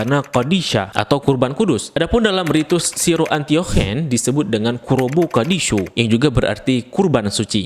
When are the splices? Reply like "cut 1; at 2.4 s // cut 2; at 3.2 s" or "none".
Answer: none